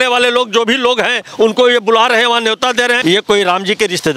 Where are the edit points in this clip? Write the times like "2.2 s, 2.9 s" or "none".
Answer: 3.0 s

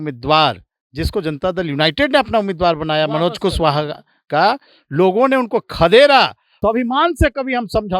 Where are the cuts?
6.4 s

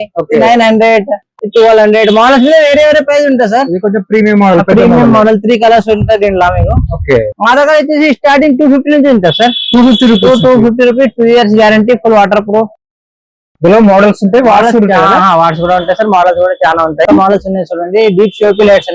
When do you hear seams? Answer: 7.4 s, 17.0 s

